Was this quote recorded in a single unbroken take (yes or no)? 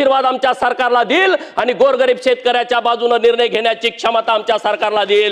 yes